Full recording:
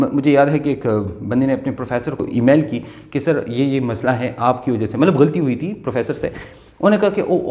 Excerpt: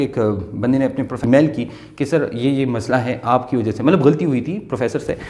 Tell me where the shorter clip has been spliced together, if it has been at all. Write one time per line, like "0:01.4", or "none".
0:01.2